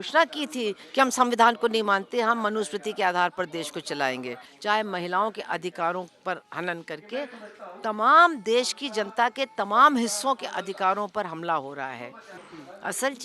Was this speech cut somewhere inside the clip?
yes; 2 cuts; at 4.5 s, 12.3 s

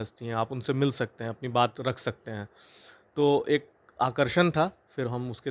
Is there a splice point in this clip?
no; 0 cuts

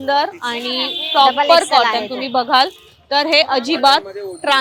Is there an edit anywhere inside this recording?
no; 0 cuts

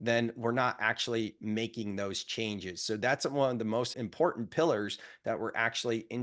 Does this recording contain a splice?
yes; 1 cut; at 3.9 s

